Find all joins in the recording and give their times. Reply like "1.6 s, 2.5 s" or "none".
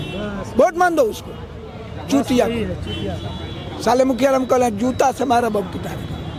none